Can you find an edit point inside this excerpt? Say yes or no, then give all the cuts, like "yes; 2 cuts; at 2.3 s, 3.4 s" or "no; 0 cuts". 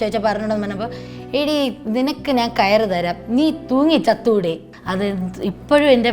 yes; 1 cut; at 4.7 s